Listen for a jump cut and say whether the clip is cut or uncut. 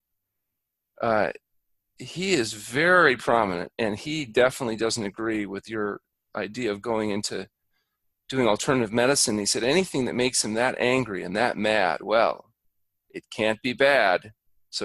uncut